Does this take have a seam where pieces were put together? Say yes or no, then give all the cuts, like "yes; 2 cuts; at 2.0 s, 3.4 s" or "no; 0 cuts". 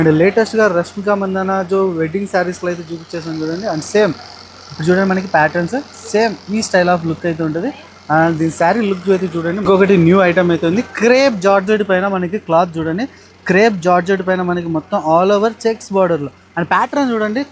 yes; 1 cut; at 9.7 s